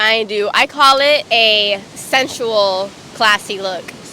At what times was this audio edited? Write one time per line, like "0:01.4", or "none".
0:01.2